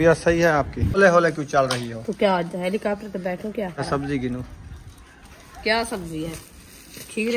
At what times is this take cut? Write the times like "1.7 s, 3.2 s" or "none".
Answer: 1.0 s, 3.8 s